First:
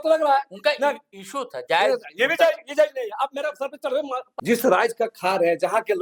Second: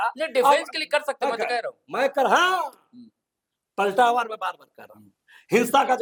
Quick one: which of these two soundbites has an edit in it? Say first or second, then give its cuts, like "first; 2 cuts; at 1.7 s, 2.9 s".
first; 1 cut; at 4.2 s